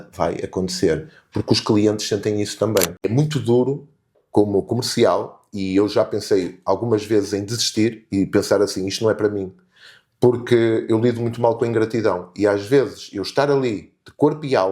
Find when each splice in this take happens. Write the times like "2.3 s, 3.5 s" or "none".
3.1 s